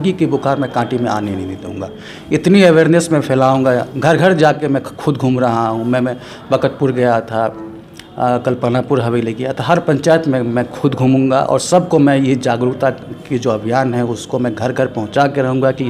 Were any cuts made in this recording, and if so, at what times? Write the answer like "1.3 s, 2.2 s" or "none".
none